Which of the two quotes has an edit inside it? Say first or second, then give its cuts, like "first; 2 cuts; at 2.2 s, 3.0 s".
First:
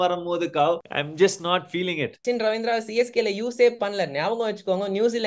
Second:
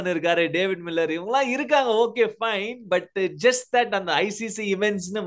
first; 2 cuts; at 1.0 s, 2.2 s